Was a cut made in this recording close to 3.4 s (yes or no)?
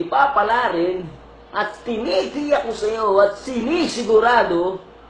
yes